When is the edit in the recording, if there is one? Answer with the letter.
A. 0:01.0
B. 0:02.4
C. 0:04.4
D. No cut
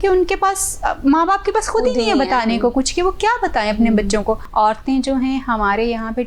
C